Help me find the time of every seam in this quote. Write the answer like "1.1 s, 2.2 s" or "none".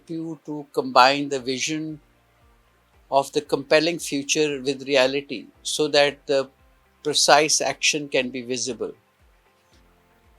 none

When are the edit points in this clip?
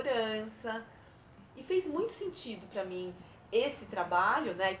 none

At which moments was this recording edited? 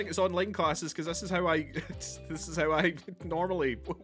none

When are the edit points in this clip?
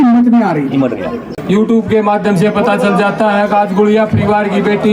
1.3 s

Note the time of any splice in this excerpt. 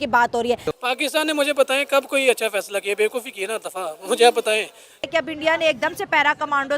5.1 s

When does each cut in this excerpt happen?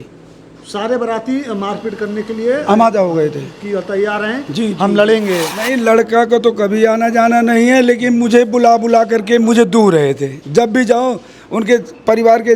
5.5 s

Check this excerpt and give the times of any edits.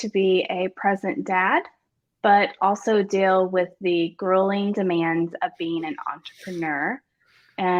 none

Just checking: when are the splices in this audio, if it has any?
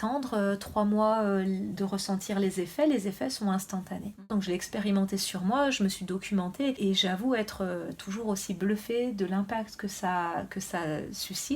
4.3 s, 6.8 s

